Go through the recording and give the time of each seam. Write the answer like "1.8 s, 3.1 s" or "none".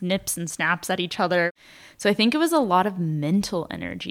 1.5 s